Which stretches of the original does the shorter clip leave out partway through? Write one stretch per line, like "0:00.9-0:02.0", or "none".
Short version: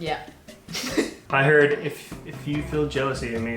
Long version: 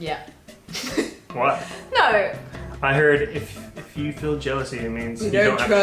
0:01.2-0:02.7